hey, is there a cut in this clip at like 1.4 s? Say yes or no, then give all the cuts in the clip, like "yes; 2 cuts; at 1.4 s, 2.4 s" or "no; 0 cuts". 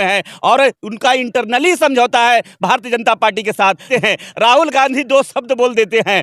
no; 1 cut; at 3.8 s